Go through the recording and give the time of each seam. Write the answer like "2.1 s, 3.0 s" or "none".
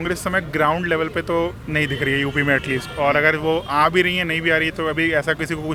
none